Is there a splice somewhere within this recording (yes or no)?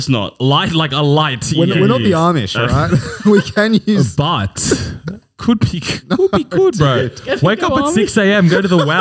no